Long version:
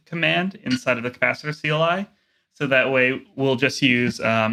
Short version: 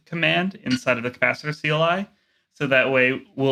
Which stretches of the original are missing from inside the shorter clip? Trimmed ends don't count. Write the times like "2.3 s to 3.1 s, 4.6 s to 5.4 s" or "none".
none

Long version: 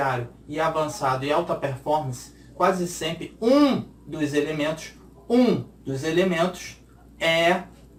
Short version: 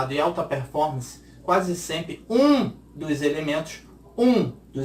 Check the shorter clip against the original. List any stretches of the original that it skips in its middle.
none

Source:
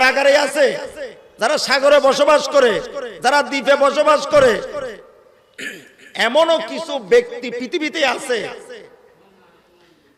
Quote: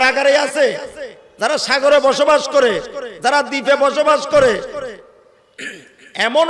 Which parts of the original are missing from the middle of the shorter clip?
none

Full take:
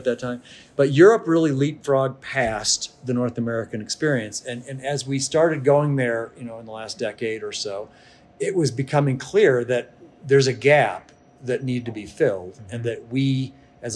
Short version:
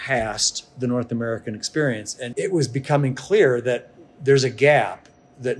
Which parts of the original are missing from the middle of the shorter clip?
4.4 s to 8.2 s

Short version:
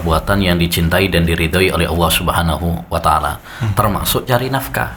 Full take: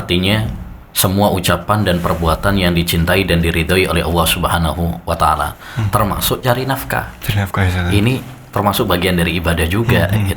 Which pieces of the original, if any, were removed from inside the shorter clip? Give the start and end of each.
none

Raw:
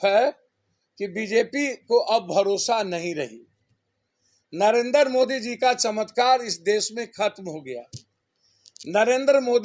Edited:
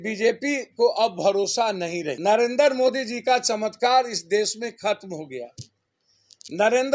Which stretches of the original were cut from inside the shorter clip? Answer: 3.2 s to 4.5 s

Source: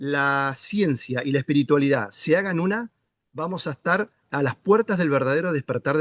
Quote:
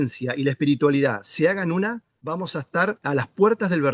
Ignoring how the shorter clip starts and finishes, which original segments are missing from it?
3.0 s to 3.2 s, 4.1 s to 4.3 s

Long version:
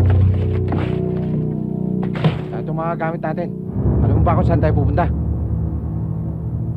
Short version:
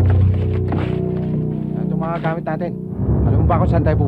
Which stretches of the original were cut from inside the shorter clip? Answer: 2.0 s to 2.8 s

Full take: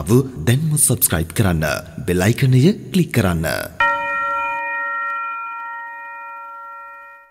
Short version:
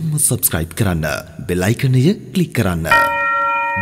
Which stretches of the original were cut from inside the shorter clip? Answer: 3.5 s to 3.8 s

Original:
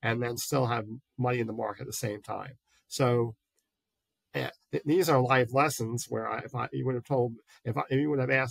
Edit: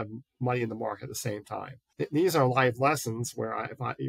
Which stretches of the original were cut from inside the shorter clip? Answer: 2.6 s to 4.6 s

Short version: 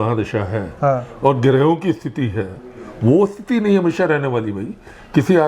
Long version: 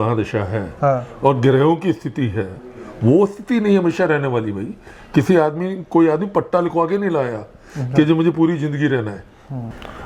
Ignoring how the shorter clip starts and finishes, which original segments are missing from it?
none

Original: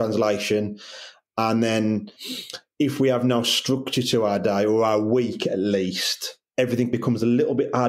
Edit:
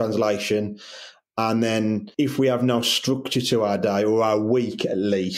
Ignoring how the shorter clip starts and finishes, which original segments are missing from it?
2.1 s to 2.7 s

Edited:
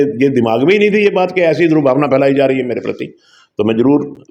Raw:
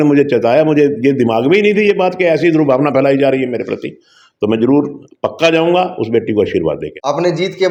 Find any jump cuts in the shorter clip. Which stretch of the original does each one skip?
none

